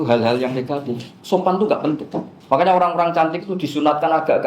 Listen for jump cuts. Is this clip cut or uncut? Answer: uncut